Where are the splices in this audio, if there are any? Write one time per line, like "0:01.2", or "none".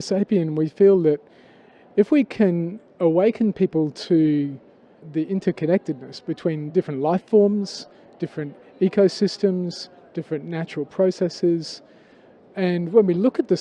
0:05.0

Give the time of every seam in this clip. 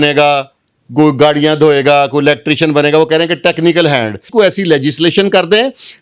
0:04.3

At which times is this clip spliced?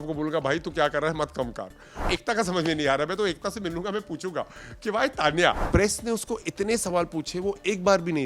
0:02.1
0:05.6

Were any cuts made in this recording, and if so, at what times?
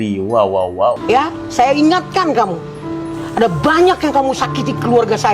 0:01.0

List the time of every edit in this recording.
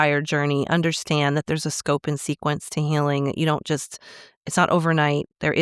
none

